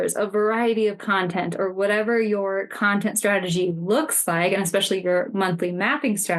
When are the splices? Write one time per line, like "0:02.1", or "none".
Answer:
none